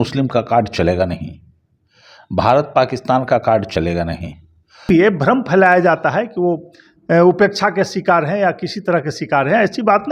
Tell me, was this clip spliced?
yes; 1 cut; at 4.9 s

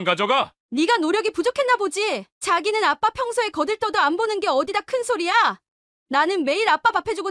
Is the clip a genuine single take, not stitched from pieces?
yes; 0 cuts

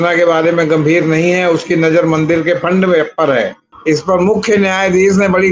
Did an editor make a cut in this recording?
yes; 1 cut; at 3.7 s

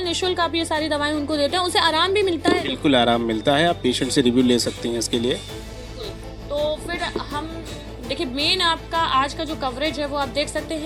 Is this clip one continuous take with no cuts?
yes; 0 cuts

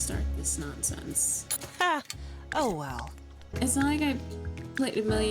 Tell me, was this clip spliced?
yes; 1 cut; at 3.5 s

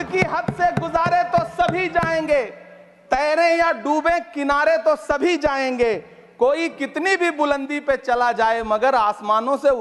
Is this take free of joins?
yes; 0 cuts

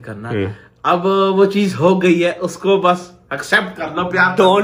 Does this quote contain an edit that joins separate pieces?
no; 0 cuts

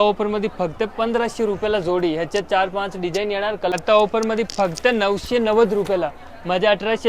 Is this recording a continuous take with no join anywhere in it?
no; 1 cut; at 3.7 s

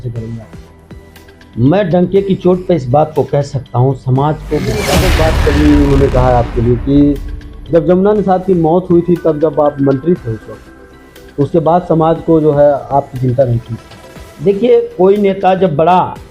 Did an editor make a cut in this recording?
yes; 1 cut; at 4.9 s

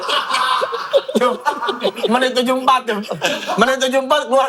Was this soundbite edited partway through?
no; 0 cuts

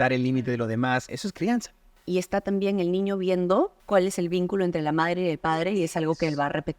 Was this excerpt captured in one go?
no; 2 cuts; at 1.6 s, 3.8 s

